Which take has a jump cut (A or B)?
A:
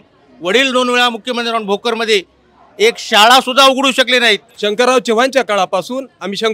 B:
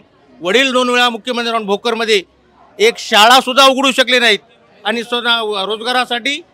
A